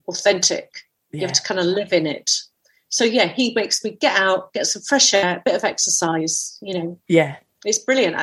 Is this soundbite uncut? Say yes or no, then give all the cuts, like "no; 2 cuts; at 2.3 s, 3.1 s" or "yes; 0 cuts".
no; 2 cuts; at 2.5 s, 5.2 s